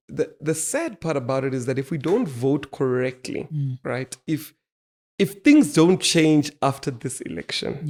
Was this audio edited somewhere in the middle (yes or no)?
no